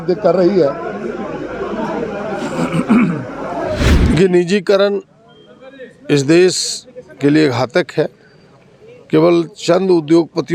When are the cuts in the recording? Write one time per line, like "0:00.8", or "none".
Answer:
0:03.9